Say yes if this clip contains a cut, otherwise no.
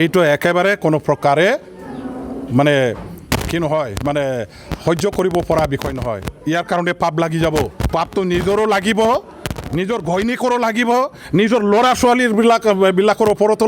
yes